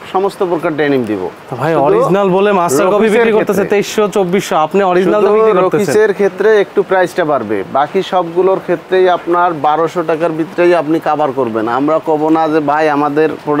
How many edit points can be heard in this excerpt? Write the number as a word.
zero